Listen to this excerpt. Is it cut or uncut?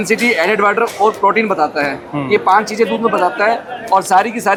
uncut